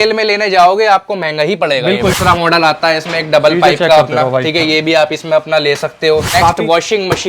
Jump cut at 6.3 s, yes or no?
yes